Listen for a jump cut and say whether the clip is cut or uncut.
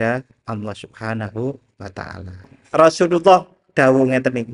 cut